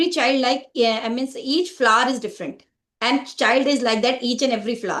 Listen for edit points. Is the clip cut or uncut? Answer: uncut